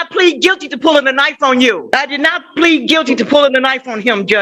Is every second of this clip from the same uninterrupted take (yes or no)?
yes